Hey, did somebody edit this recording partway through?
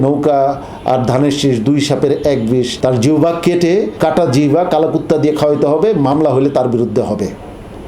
yes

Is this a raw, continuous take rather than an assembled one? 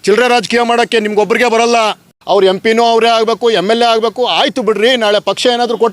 no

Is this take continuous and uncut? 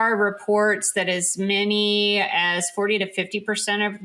yes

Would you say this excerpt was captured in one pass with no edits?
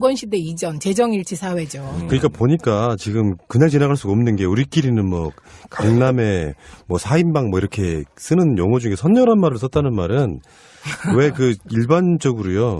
no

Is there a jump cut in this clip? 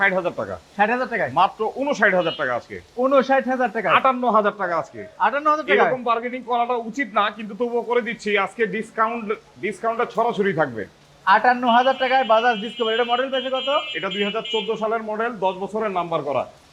no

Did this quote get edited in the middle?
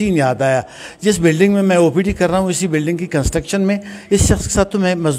no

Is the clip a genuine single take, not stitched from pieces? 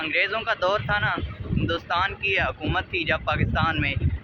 yes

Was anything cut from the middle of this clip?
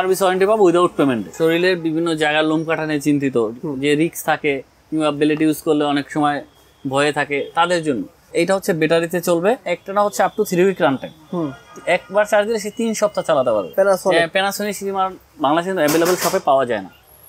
yes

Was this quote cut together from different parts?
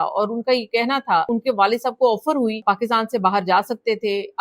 yes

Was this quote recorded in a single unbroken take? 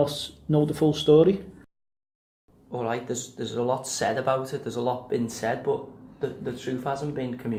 yes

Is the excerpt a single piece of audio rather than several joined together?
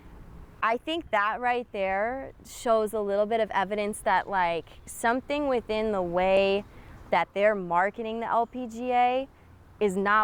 yes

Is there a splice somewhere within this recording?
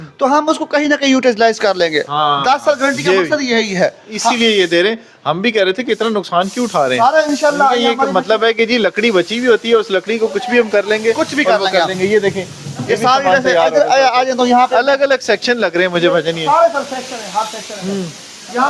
no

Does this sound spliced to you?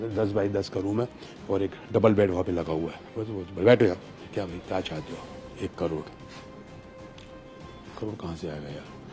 yes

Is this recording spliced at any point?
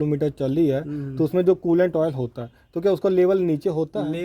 no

